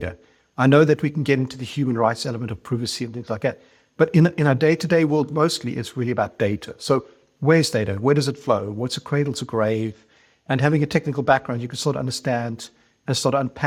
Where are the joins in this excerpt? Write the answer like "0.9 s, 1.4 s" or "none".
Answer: none